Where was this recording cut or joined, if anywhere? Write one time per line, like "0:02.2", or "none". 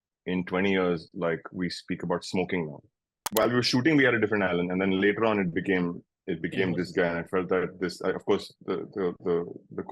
0:03.4